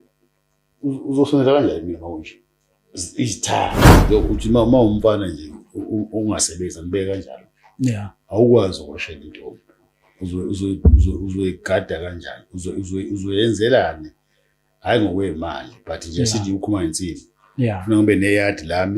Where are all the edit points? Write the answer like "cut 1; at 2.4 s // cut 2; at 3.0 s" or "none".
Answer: cut 1; at 3.9 s